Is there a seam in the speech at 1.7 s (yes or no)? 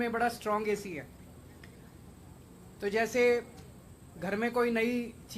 yes